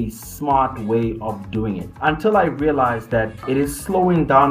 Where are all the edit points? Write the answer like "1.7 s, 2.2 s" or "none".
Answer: 1.9 s, 3.4 s